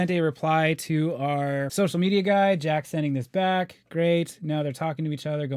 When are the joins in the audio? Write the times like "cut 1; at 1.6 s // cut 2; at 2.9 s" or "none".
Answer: none